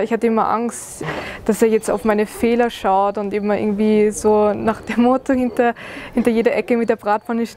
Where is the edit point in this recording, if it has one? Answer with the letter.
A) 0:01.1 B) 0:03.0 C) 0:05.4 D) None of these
A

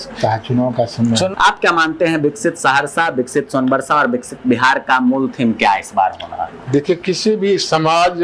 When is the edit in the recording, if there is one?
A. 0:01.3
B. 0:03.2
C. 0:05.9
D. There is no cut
A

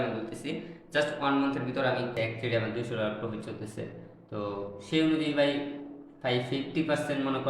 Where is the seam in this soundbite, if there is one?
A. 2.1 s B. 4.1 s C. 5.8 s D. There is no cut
A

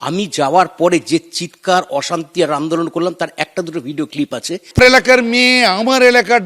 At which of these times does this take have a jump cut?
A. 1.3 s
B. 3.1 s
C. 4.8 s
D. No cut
C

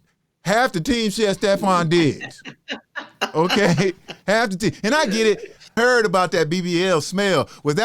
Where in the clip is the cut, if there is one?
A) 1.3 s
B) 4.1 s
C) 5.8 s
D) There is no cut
C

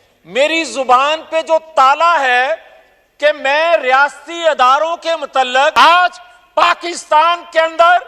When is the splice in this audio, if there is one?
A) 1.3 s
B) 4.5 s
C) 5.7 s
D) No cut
C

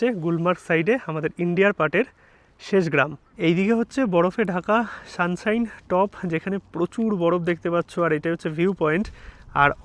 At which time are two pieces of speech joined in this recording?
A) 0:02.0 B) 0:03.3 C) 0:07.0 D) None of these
B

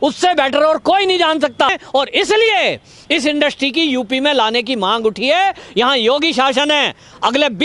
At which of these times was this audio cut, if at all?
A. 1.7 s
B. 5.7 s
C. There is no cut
A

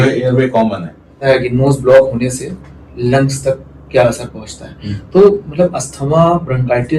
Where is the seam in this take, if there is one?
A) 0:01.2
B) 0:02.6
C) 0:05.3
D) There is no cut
A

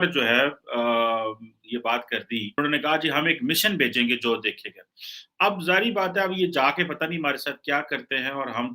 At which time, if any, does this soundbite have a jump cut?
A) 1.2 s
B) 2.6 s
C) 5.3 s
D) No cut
B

